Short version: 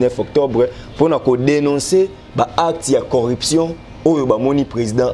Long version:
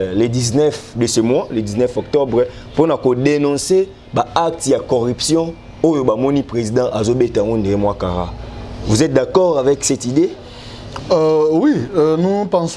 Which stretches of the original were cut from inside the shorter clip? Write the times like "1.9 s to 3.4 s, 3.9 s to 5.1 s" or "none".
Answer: none